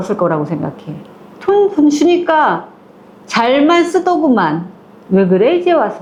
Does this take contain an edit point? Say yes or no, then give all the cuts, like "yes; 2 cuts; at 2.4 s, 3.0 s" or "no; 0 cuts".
no; 0 cuts